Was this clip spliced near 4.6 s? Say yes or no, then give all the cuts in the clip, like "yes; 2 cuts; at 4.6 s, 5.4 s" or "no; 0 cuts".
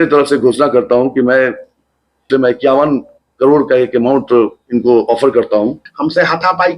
no; 2 cuts; at 2.3 s, 5.9 s